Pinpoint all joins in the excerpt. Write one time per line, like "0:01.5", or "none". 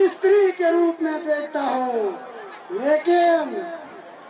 none